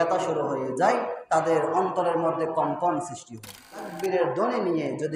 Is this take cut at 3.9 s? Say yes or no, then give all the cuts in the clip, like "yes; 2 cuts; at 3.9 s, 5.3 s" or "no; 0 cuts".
yes; 1 cut; at 3.9 s